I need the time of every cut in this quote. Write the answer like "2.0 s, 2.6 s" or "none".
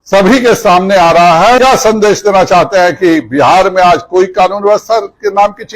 1.6 s